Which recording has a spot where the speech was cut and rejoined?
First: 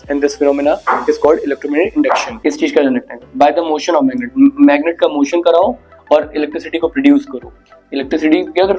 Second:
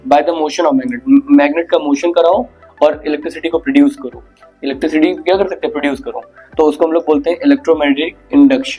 first; 1 cut; at 2.3 s

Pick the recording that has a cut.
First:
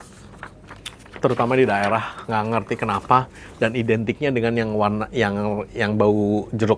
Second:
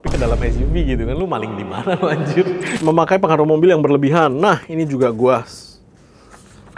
second; 1 cut; at 2.8 s

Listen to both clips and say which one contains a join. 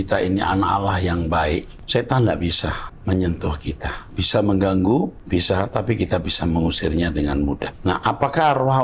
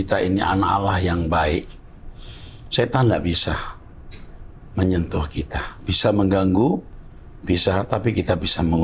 first; 4 cuts; at 1.8 s, 2.9 s, 5.2 s, 7.7 s

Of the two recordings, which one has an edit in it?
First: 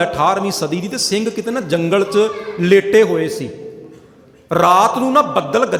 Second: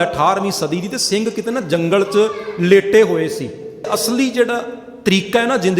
second; 1 cut; at 3.9 s

